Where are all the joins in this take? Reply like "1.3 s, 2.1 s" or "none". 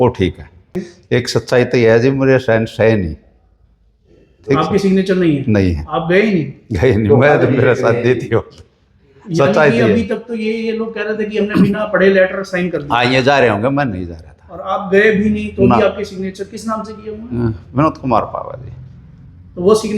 1.0 s